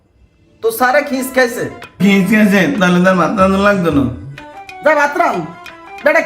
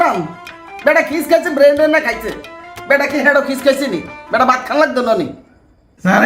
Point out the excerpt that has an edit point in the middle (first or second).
first